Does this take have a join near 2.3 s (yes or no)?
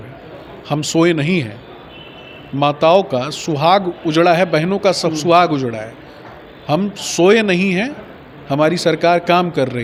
no